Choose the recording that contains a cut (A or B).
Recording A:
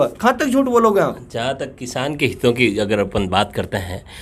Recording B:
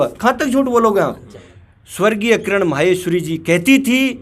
B